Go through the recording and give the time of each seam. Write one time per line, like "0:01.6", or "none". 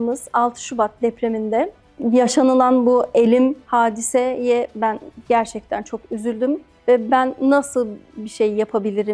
0:06.7

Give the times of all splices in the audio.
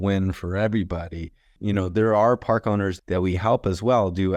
0:01.5
0:03.0

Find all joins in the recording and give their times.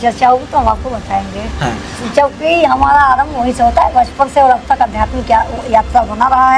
none

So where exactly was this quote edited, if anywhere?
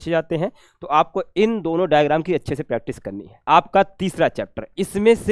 0:03.3

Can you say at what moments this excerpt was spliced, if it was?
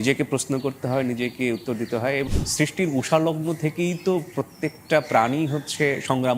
0:02.3

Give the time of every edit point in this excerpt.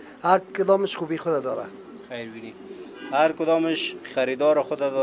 none

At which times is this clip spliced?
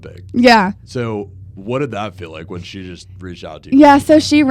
none

